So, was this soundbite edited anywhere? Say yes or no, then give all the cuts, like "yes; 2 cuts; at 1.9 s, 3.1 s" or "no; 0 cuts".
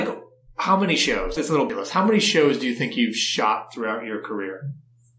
yes; 1 cut; at 1.4 s